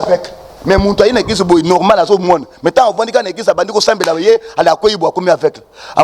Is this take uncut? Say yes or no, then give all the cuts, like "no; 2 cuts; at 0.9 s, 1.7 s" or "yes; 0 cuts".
yes; 0 cuts